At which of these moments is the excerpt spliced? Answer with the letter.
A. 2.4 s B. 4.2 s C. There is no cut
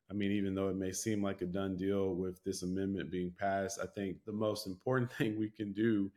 B